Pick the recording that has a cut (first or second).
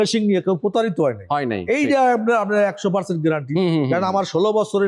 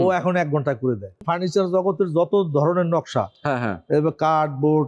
second